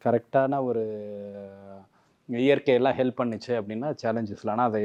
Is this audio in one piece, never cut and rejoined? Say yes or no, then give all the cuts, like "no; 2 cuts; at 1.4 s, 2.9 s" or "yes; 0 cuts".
yes; 0 cuts